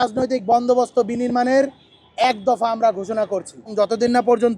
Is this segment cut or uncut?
cut